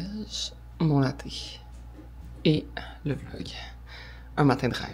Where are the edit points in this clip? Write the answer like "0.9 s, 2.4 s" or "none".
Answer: none